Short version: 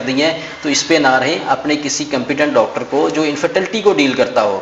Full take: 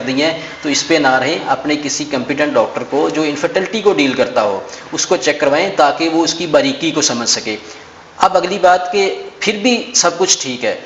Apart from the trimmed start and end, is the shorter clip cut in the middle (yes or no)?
no